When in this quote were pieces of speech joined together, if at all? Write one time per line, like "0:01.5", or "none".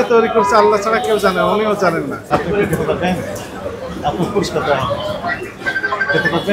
0:02.2

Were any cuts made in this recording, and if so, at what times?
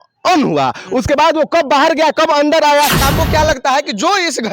0:03.0

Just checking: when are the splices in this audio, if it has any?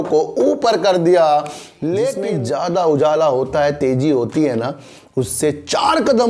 0:02.2

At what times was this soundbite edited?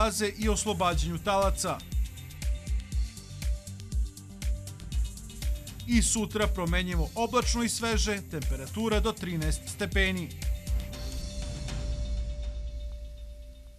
none

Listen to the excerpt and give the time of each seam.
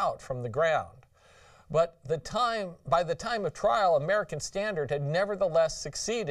0:01.5

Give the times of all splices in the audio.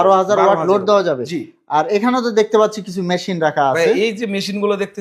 none

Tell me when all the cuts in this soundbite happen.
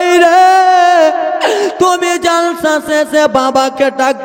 none

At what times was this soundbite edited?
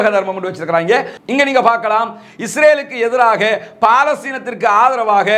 0:01.1

